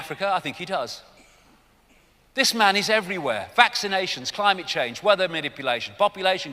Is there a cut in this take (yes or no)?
yes